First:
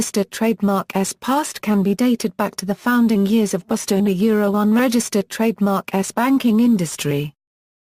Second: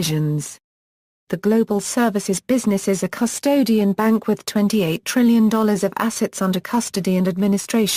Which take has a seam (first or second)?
first